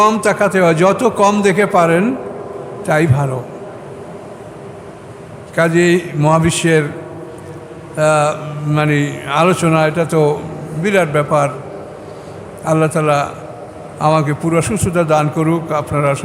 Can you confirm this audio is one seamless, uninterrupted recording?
yes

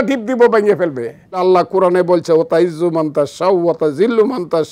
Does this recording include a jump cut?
yes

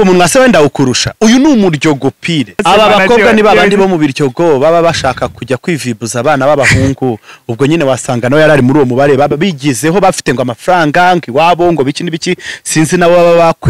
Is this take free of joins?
no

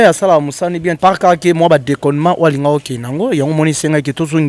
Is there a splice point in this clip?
yes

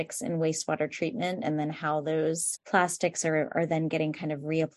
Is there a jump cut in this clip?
yes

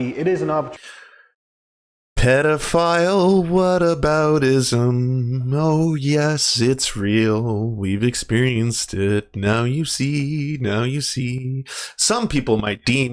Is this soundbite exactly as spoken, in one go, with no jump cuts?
yes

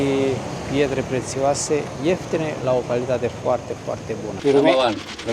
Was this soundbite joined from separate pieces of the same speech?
yes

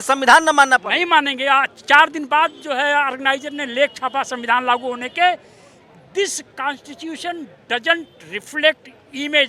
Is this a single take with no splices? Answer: yes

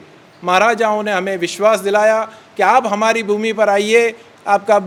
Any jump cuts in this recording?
no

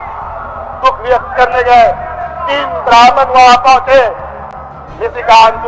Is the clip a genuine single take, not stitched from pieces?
yes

